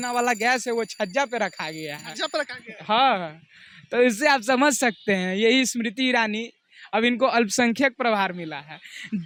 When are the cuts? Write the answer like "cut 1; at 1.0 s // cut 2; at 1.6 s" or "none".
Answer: none